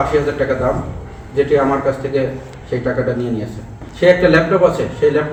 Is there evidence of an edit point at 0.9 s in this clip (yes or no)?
no